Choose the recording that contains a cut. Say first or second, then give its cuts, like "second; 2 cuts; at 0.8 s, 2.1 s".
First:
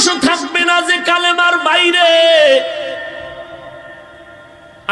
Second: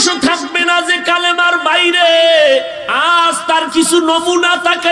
second; 1 cut; at 2.8 s